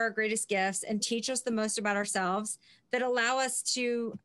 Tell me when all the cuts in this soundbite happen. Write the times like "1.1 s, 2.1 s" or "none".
none